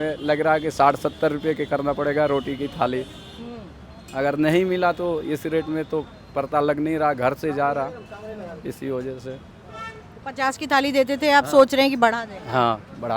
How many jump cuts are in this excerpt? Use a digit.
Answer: 0